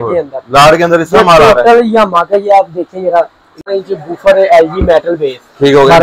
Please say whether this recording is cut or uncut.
cut